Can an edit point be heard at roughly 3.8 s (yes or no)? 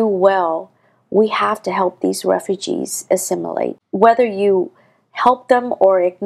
yes